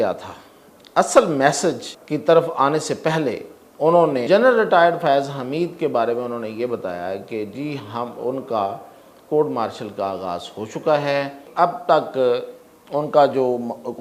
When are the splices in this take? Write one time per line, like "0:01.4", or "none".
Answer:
0:01.9
0:04.3
0:11.4